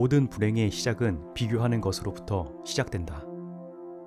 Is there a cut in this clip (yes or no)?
no